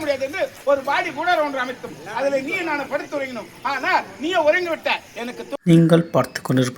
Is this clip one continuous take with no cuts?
no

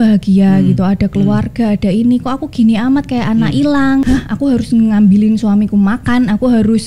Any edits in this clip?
yes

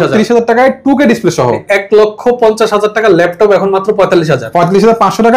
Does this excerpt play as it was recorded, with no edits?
no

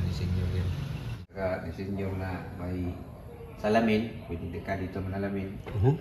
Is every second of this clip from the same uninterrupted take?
no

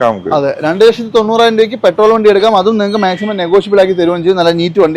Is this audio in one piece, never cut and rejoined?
yes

